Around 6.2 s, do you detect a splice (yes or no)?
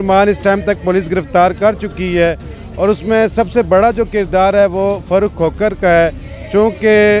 no